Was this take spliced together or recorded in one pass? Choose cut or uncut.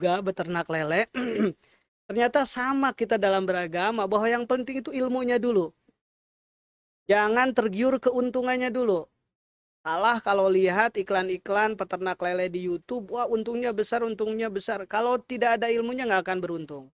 uncut